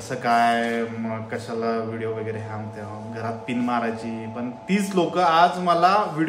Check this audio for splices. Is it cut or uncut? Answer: uncut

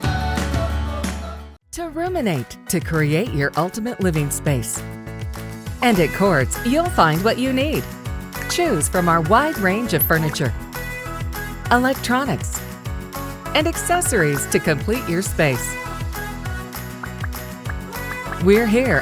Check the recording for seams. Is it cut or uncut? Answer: cut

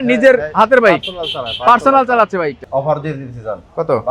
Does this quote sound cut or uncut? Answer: cut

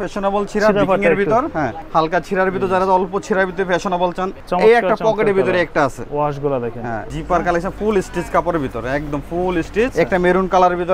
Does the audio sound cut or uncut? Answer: cut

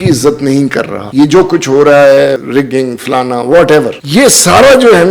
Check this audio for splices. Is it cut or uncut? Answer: cut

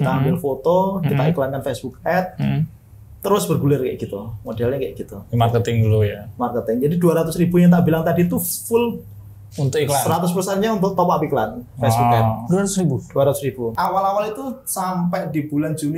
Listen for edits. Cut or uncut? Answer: cut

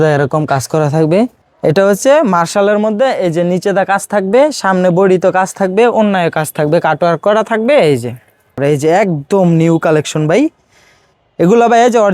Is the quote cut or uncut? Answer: cut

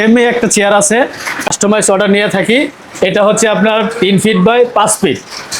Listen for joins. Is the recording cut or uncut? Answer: cut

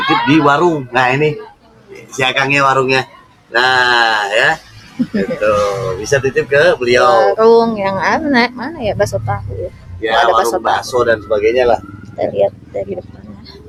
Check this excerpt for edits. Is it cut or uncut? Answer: uncut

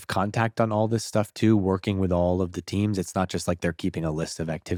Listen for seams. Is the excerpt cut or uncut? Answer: uncut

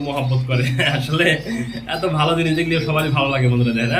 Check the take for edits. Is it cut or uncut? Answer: uncut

